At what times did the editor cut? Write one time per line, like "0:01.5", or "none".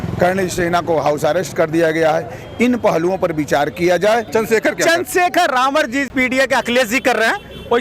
0:04.3
0:06.1

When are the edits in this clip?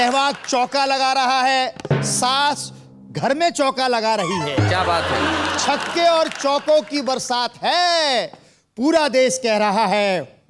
none

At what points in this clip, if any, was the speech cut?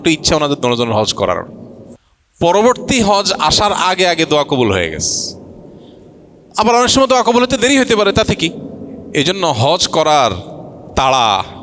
none

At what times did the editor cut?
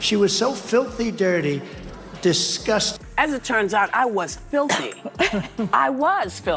none

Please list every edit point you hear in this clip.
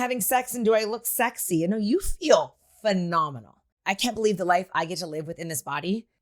0:03.7

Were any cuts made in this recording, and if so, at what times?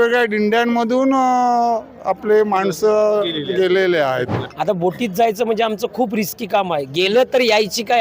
0:04.4

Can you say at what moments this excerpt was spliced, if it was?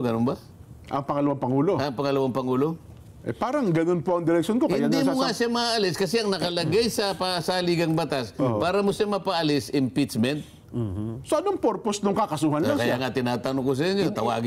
none

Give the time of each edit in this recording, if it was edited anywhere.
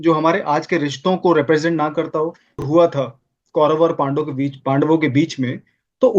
0:02.6

